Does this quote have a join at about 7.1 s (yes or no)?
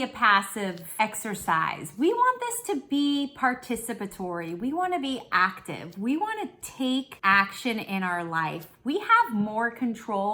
yes